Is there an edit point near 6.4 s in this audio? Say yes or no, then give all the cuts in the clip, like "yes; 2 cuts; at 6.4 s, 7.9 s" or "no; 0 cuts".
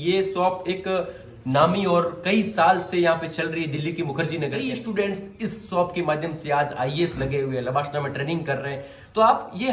no; 1 cut; at 4.7 s